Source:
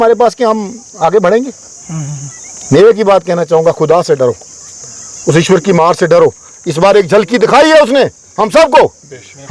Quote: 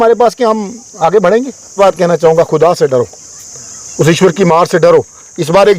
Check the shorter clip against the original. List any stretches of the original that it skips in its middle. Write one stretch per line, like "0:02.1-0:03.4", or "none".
0:01.7-0:03.0